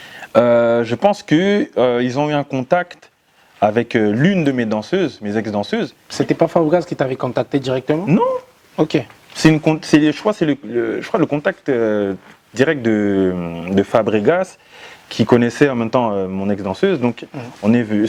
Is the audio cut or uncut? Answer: cut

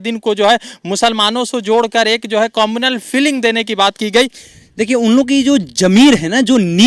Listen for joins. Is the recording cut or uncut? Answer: cut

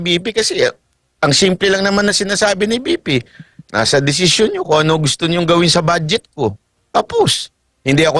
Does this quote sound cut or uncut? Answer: uncut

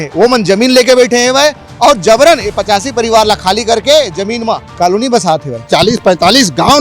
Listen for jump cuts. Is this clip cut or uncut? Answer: cut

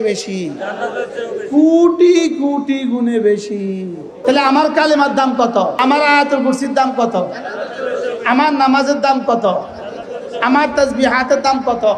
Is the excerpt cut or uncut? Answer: cut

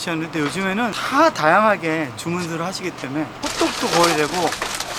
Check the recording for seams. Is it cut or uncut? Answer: cut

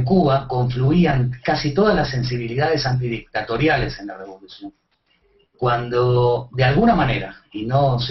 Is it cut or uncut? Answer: uncut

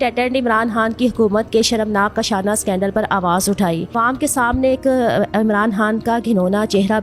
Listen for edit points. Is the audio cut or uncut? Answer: uncut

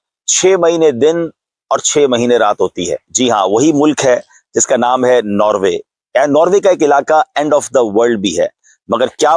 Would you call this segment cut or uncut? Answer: uncut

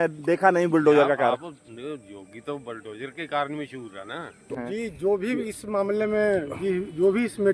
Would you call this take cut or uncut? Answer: cut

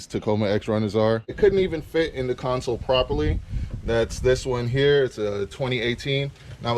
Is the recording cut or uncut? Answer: cut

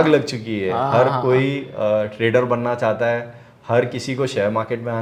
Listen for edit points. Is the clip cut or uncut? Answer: uncut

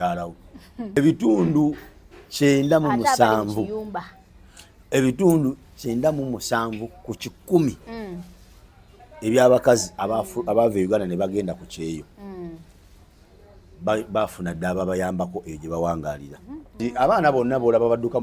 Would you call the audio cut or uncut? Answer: cut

